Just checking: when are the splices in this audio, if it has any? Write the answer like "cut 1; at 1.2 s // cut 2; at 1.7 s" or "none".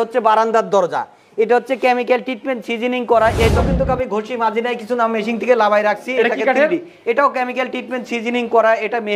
cut 1; at 3.4 s

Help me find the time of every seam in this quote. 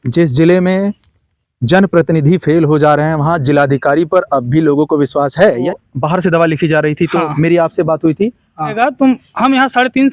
cut 1; at 5.7 s // cut 2; at 8.7 s

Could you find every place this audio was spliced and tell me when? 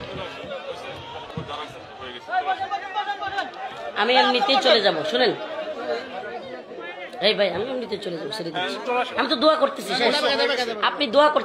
cut 1; at 1.2 s

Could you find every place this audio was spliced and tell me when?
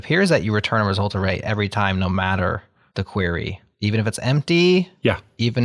none

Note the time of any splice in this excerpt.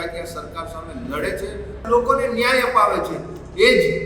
cut 1; at 1.8 s

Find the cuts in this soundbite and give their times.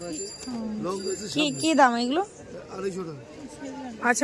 none

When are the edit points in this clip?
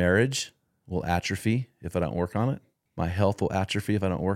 cut 1; at 2.8 s

